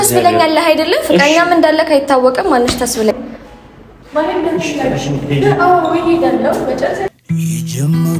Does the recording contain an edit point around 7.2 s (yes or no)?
no